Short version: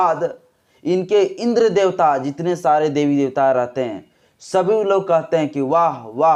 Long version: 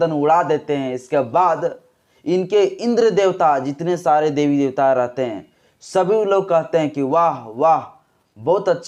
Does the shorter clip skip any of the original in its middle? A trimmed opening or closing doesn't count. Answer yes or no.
no